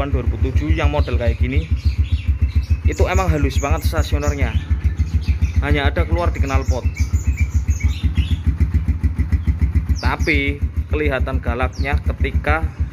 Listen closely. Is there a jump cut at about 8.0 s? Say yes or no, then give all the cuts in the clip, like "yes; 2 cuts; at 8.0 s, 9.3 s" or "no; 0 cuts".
yes; 1 cut; at 8.0 s